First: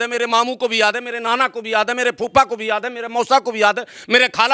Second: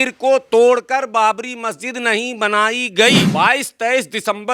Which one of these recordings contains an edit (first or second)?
second